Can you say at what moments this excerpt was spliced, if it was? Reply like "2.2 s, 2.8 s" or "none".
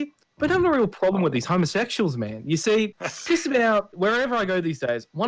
3.1 s, 3.9 s